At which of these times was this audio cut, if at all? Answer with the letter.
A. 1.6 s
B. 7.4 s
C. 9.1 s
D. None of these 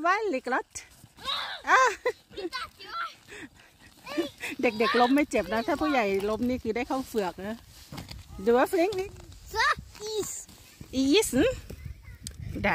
D